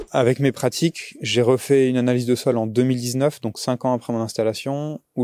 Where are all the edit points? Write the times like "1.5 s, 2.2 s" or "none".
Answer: none